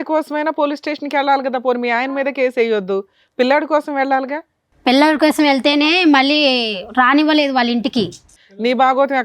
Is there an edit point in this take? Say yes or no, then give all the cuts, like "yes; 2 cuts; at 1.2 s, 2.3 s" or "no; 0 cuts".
yes; 1 cut; at 8.3 s